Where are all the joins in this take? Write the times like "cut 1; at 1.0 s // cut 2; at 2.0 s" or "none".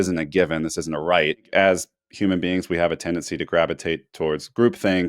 cut 1; at 1.5 s